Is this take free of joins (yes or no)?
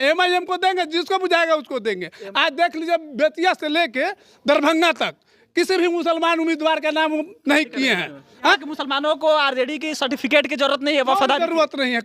no